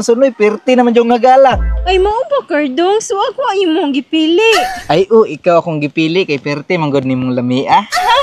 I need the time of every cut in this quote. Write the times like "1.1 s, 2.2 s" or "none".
none